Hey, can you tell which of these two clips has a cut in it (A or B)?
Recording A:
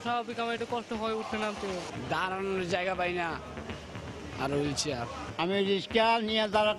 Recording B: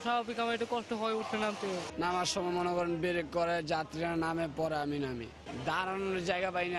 A